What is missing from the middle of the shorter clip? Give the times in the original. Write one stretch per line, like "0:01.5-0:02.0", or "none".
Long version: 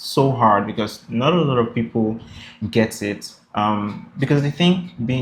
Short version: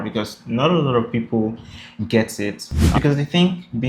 0:03.4-0:04.1